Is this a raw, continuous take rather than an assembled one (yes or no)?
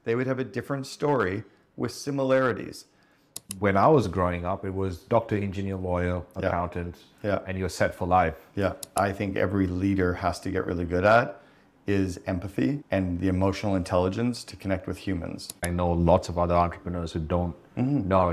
no